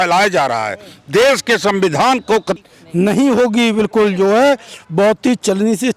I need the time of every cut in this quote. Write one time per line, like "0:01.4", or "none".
0:02.5